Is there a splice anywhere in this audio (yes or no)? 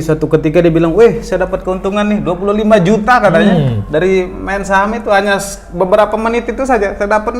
no